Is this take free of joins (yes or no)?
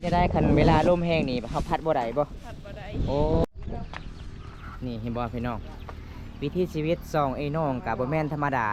no